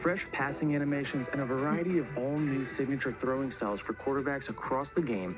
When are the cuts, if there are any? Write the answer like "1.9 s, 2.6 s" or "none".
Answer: 1.3 s, 2.7 s

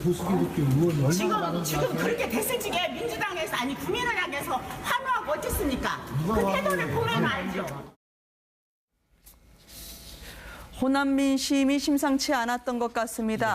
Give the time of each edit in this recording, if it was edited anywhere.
11.3 s

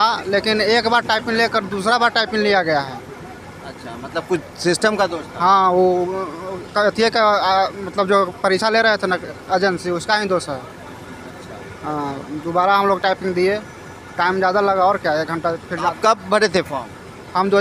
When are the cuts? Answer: none

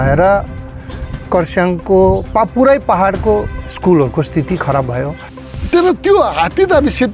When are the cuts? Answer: 5.5 s

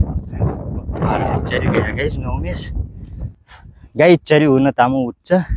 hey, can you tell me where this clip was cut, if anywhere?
3.2 s

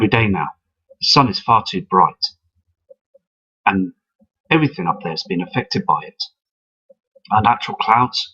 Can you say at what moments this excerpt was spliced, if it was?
6.6 s

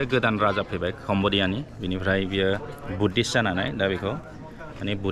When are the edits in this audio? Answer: none

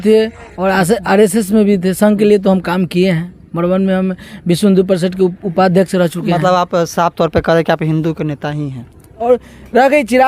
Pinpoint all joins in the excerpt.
9.2 s

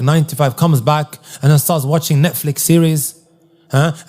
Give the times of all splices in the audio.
none

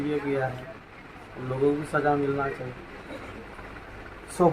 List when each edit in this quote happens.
none

